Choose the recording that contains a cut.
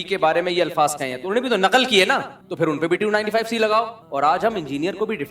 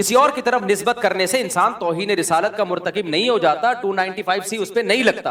first; 1 cut; at 4.0 s

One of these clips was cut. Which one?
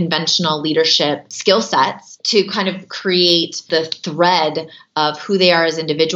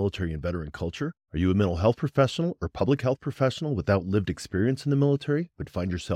first; 3 cuts; at 1.3 s, 2.1 s, 3.6 s

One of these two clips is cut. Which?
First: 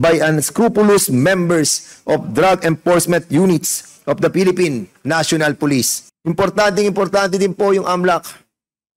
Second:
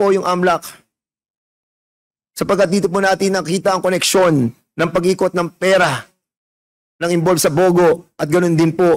first; 1 cut; at 6.0 s

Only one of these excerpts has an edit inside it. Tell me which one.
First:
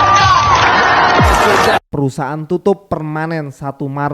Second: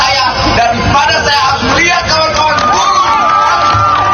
first; 1 cut; at 1.9 s

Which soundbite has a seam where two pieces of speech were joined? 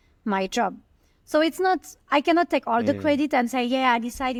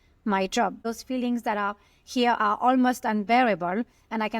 second; 1 cut; at 0.9 s

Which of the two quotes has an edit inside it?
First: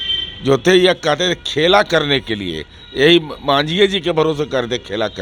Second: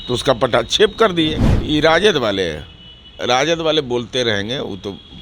second; 1 cut; at 1.5 s

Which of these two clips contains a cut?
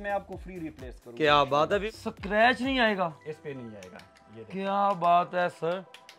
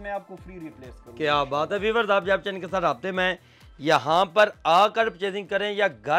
first; 1 cut; at 1.8 s

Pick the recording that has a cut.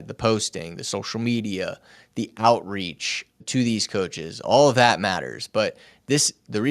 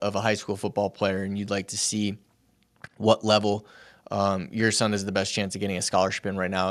first; 1 cut; at 3.4 s

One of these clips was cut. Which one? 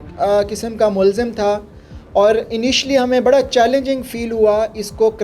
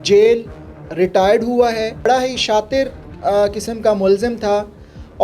second; 1 cut; at 2.1 s

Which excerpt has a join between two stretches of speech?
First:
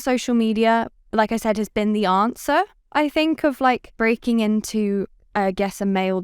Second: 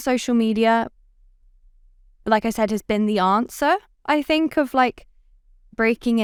first; 2 cuts; at 1.0 s, 3.9 s

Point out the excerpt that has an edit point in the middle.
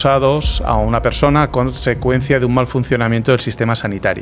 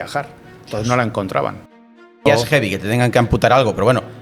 second; 1 cut; at 2.2 s

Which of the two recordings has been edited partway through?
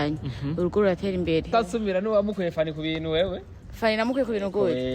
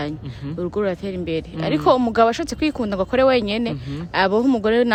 first; 1 cut; at 1.5 s

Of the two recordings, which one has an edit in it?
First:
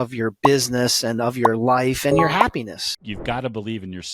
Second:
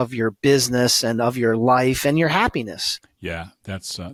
first; 1 cut; at 2.9 s

